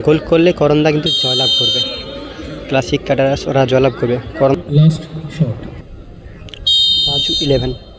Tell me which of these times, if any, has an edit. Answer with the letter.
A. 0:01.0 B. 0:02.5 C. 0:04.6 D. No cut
C